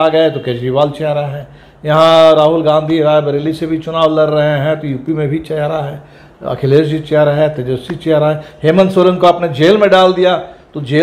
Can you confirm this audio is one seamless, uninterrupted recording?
yes; 0 cuts

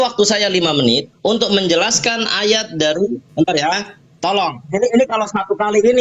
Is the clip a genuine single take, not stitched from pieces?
no; 2 cuts; at 1.1 s, 3.2 s

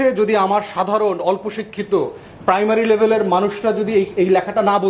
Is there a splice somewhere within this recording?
no; 0 cuts

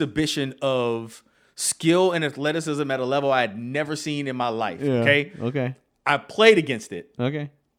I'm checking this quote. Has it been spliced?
no; 0 cuts

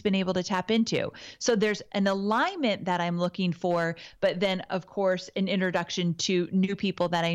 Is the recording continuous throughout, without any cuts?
yes; 0 cuts

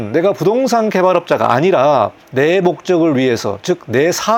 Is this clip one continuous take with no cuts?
yes; 0 cuts

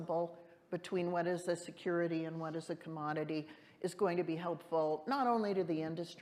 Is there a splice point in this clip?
no; 0 cuts

